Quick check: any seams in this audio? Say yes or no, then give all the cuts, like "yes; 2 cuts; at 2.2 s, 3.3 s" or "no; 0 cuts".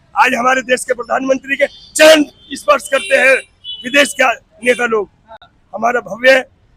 no; 0 cuts